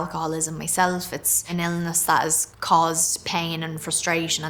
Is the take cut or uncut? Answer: uncut